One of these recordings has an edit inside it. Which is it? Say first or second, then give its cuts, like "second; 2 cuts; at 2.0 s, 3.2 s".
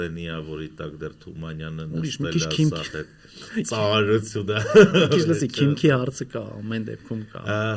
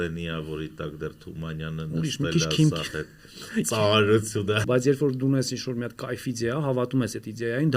second; 1 cut; at 4.6 s